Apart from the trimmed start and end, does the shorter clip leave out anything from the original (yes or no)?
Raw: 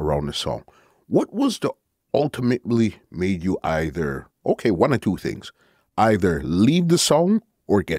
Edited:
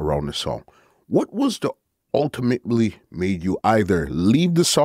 yes